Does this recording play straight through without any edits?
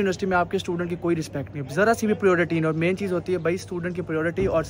yes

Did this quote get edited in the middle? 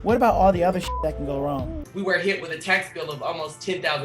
yes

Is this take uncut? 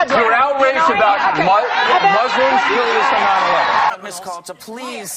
no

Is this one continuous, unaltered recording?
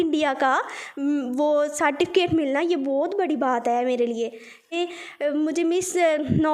no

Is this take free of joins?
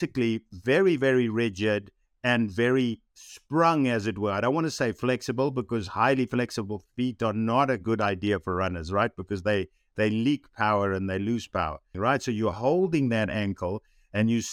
no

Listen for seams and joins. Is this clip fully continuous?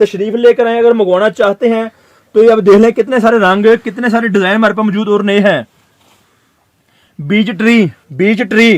yes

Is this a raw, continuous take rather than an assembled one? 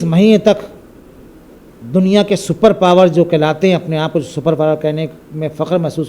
yes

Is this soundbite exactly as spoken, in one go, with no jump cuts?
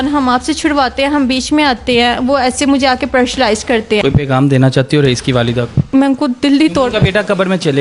no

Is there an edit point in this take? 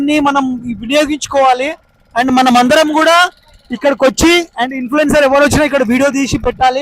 no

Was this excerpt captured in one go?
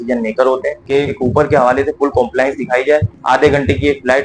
no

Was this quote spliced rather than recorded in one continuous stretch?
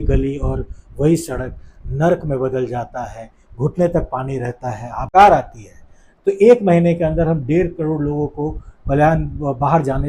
yes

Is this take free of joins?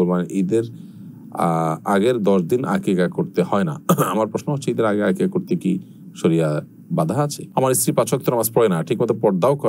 no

